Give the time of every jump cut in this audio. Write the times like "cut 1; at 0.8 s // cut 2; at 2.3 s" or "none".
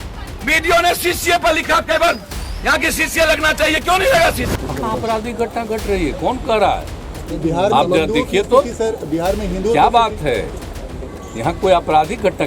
cut 1; at 4.5 s